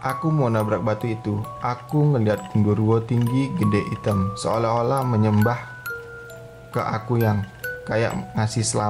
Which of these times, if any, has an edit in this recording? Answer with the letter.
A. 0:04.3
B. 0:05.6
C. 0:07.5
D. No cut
D